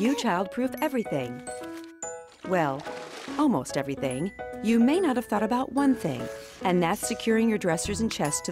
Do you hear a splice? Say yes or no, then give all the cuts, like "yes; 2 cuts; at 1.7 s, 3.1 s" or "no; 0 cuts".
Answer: no; 0 cuts